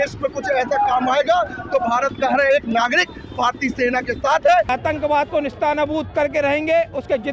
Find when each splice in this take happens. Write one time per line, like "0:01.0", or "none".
0:04.7